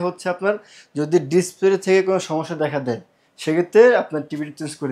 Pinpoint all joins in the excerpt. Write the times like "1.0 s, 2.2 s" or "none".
none

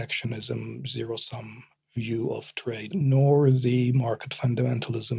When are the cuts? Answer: 2.8 s

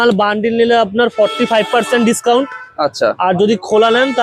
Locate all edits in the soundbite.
none

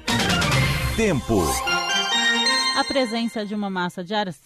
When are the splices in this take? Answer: 2.7 s

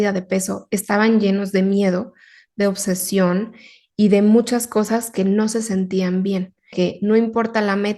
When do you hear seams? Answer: 6.7 s

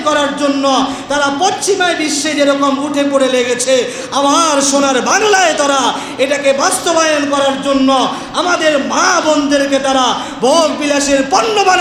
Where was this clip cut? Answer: none

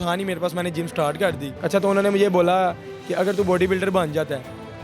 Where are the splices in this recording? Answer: none

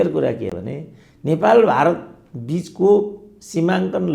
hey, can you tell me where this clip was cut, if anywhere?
none

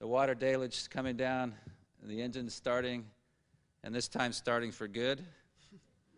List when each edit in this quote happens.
4.9 s

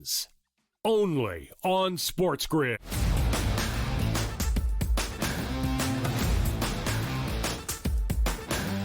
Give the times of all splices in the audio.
2.9 s

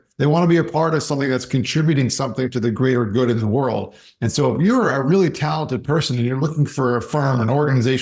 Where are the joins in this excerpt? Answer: none

